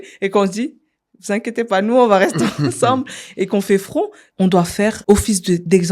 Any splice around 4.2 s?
yes; 2 cuts; at 4.2 s, 5.0 s

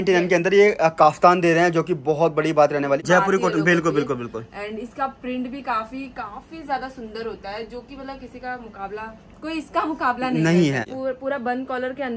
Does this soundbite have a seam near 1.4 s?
no; 2 cuts; at 3.0 s, 10.9 s

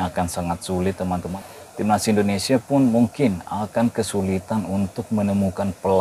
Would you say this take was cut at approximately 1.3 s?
yes; 1 cut; at 1.3 s

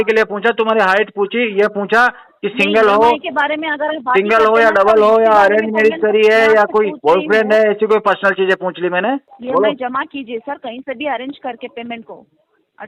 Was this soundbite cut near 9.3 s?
yes; 1 cut; at 9.3 s

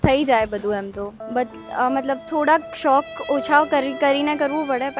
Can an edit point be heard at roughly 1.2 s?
yes; 1 cut; at 1.2 s

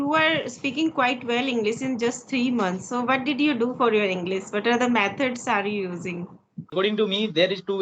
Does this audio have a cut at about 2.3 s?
no; 1 cut; at 6.7 s

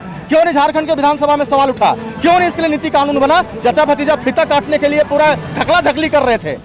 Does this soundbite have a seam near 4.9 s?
no; 1 cut; at 3.5 s

